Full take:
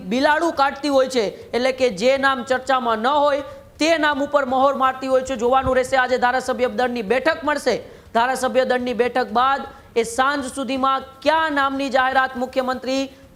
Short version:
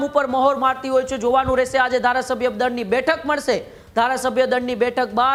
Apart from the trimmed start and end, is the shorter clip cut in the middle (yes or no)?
no